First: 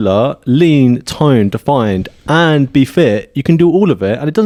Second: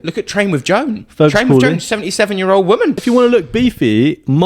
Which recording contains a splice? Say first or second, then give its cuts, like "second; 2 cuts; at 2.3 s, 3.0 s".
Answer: second; 1 cut; at 3.0 s